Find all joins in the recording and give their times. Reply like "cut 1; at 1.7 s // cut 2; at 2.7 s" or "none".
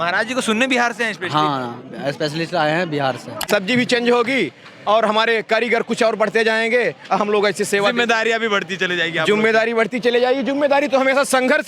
cut 1; at 3.4 s